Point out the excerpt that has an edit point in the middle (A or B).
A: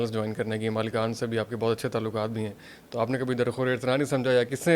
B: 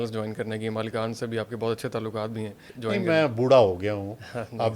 B